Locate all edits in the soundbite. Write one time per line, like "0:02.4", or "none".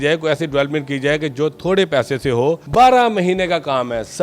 0:02.6